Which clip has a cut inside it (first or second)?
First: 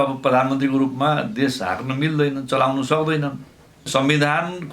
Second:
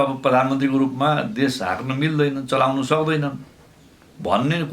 first